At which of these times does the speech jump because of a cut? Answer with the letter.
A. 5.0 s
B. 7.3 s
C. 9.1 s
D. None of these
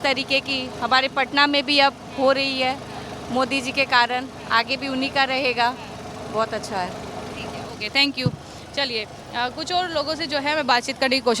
D